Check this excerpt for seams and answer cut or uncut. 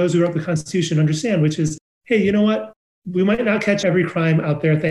uncut